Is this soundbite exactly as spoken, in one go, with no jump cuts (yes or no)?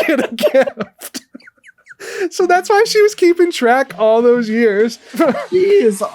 no